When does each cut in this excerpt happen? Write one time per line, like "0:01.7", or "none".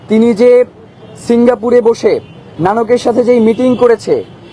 0:02.5